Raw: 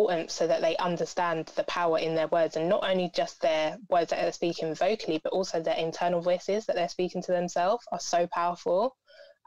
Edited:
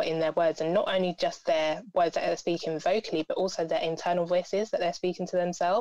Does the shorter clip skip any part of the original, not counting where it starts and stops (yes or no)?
no